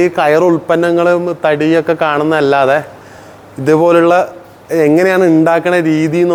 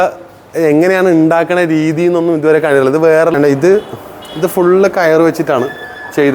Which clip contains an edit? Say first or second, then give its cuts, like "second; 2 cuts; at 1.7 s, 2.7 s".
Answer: second; 1 cut; at 3.3 s